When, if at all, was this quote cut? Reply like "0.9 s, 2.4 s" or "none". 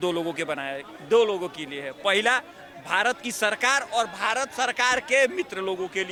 none